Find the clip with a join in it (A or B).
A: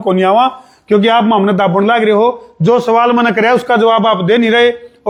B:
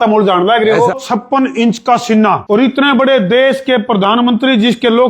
B